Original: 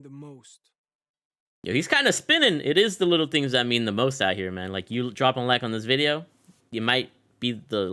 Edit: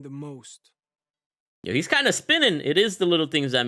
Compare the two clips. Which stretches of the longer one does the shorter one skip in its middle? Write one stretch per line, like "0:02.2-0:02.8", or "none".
none